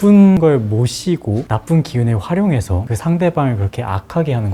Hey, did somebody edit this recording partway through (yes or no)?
no